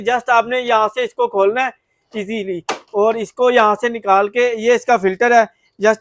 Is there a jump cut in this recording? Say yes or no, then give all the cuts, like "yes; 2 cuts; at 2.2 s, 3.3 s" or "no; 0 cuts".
no; 0 cuts